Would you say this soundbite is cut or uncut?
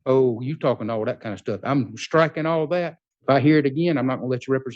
cut